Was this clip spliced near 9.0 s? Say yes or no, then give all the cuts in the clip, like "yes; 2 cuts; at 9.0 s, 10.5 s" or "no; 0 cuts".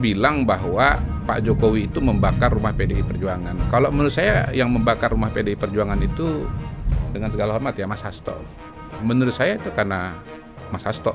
yes; 1 cut; at 9.0 s